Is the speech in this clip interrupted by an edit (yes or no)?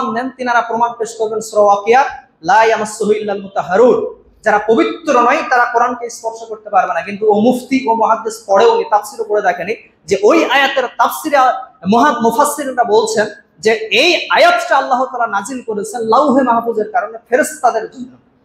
no